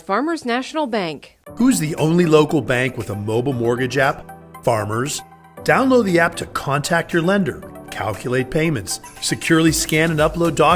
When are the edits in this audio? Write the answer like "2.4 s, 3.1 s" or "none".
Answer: none